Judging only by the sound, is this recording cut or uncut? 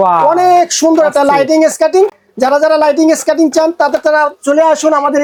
uncut